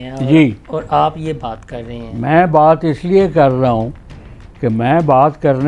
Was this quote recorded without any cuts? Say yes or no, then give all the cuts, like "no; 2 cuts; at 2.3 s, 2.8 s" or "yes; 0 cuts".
yes; 0 cuts